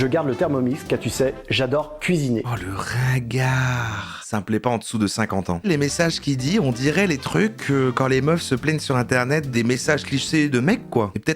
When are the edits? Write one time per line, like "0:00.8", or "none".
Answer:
0:04.1
0:05.7
0:09.5